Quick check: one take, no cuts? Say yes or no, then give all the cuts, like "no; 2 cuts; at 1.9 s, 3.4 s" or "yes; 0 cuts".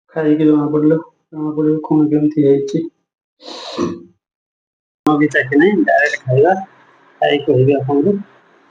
no; 1 cut; at 5.1 s